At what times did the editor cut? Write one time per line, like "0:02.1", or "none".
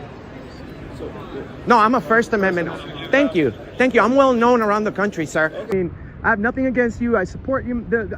0:05.7